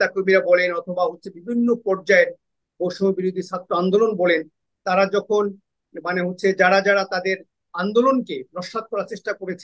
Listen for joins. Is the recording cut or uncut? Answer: uncut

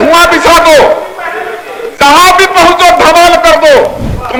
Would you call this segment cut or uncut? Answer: uncut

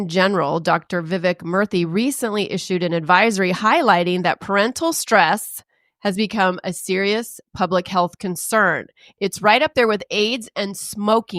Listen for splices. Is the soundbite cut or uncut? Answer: uncut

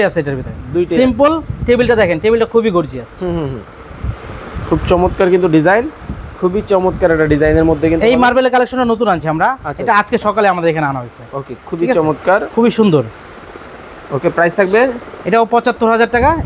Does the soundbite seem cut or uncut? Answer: uncut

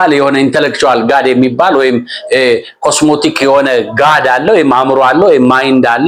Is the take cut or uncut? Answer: uncut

